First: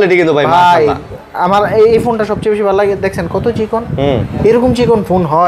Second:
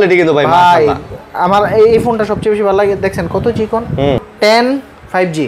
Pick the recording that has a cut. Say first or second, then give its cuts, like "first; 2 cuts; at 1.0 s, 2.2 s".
second; 1 cut; at 4.3 s